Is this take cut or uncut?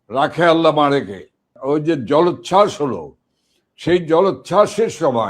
cut